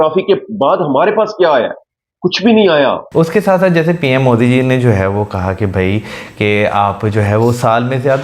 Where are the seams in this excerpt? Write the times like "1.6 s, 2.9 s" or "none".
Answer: 3.0 s